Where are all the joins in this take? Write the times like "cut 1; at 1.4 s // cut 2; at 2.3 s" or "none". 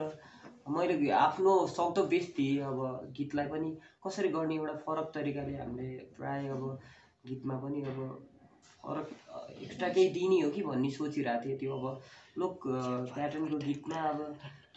none